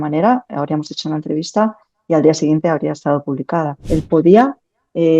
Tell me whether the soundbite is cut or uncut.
cut